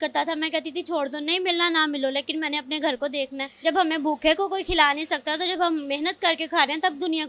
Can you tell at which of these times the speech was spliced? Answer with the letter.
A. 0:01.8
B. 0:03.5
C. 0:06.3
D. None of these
B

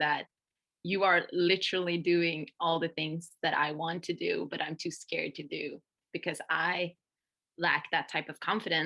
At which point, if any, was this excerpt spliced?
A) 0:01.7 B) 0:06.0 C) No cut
C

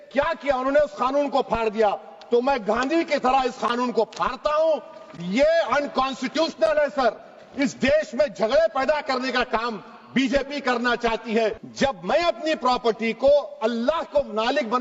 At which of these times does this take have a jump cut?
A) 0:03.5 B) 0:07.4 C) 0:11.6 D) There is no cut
C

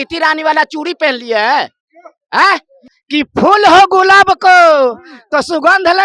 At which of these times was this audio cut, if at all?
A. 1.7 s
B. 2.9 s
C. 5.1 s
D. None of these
B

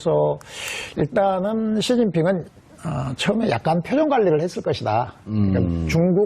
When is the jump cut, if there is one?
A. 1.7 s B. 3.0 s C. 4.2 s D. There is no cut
C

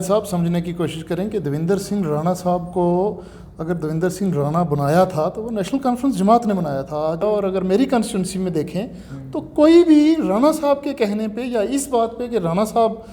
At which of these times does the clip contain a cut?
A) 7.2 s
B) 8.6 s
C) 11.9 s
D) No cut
A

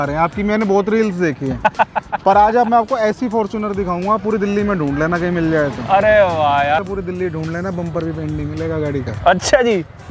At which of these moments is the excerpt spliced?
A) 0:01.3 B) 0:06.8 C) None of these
B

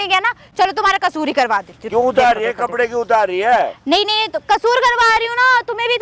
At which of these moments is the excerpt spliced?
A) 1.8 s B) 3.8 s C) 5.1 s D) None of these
A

